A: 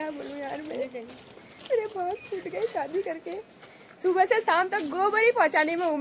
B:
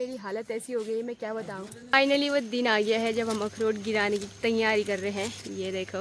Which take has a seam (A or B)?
B